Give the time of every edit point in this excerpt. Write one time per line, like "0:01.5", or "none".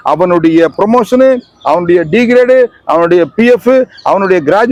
none